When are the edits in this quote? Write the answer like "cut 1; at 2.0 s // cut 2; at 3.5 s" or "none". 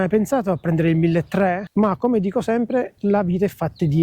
cut 1; at 1.6 s